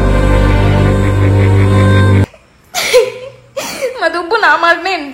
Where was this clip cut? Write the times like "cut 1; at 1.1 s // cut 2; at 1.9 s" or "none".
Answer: none